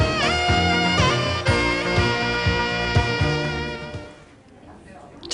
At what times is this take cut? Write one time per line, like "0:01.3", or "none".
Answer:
0:01.0